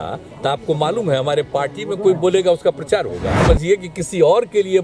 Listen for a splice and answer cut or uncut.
cut